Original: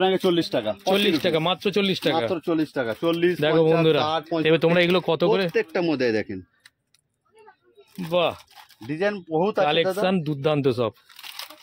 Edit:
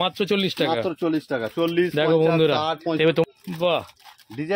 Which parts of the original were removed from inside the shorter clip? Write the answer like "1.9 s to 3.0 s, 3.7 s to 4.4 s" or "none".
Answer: 4.7 s to 7.8 s